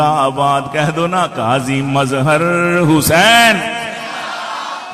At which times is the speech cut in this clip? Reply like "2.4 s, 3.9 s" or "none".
none